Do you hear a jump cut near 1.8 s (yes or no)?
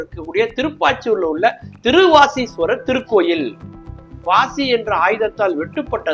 no